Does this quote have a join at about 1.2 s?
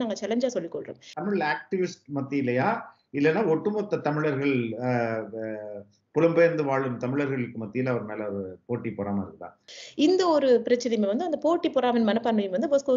yes; 2 cuts; at 1.2 s, 9.6 s

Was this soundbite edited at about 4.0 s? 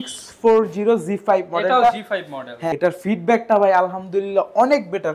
no; 1 cut; at 2.7 s

